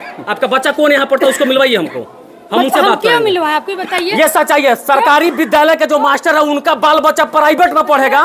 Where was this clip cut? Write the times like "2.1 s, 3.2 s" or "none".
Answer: none